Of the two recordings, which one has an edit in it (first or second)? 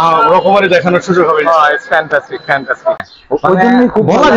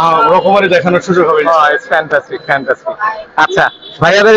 first